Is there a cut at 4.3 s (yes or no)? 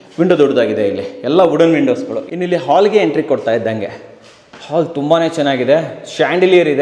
no